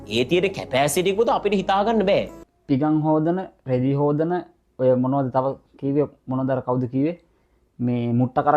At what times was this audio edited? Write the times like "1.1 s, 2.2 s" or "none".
2.4 s